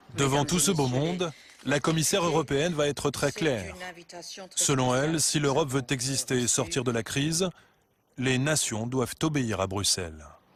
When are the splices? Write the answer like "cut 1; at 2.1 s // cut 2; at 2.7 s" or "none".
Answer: none